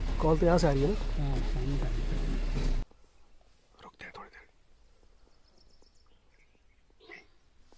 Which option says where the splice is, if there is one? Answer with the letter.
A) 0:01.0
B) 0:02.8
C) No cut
B